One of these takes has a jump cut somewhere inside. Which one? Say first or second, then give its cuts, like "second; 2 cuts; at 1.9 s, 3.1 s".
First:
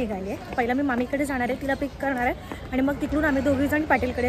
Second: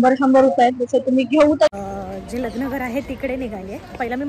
second; 1 cut; at 1.7 s